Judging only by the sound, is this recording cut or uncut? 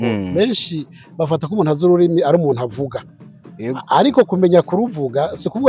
uncut